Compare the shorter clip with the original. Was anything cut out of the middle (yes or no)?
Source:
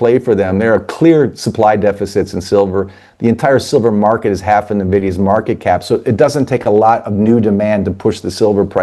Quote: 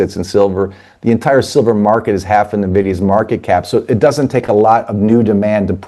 no